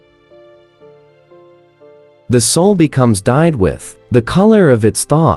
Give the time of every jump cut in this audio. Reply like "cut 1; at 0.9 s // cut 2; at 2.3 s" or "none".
none